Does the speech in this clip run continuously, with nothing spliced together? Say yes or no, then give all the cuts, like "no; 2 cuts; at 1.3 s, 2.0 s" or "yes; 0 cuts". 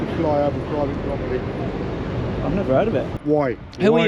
no; 1 cut; at 3.1 s